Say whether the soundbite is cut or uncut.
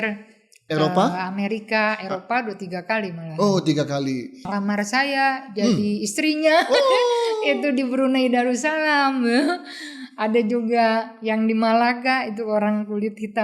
cut